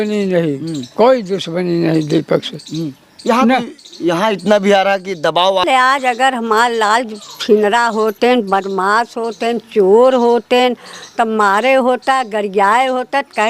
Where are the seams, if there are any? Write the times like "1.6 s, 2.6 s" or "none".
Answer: 5.6 s